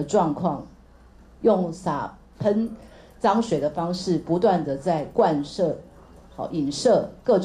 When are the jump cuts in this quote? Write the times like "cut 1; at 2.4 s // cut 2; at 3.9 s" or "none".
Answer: none